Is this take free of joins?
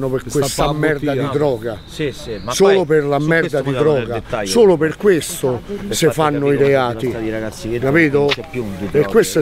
yes; 0 cuts

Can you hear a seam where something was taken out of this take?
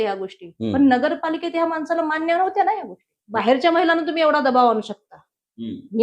yes; 1 cut; at 3.1 s

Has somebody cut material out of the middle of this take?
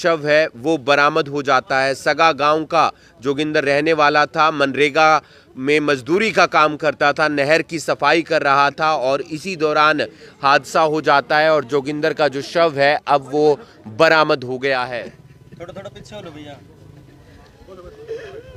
no; 0 cuts

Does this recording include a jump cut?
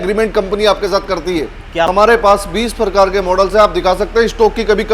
yes; 1 cut; at 1.9 s

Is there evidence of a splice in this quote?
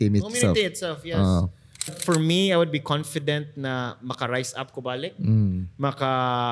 yes; 1 cut; at 2.0 s

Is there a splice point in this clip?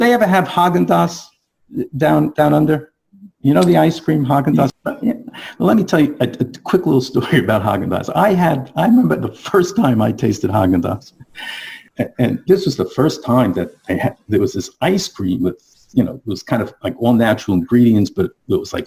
yes; 2 cuts; at 4.7 s, 11.8 s

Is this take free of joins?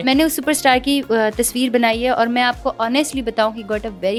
yes; 0 cuts

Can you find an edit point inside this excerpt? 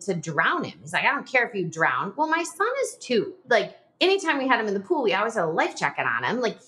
yes; 1 cut; at 3.4 s

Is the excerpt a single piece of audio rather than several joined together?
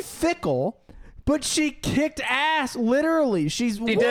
yes; 0 cuts

